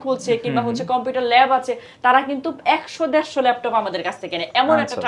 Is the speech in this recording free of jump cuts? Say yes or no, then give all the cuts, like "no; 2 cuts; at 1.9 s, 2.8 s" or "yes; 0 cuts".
yes; 0 cuts